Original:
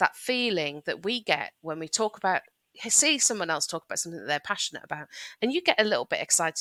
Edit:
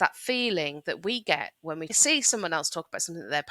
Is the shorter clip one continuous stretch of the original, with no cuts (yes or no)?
no